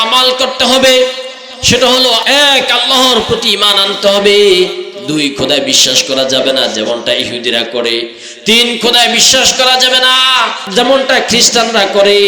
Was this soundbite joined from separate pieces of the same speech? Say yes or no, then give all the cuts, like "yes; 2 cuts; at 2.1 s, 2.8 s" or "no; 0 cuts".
yes; 2 cuts; at 2.2 s, 10.7 s